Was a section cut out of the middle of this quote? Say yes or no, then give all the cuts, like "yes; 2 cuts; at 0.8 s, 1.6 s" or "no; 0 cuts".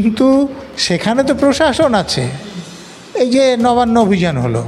no; 0 cuts